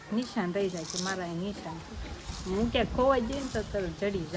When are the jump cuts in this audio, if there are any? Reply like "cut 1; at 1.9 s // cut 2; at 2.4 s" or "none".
none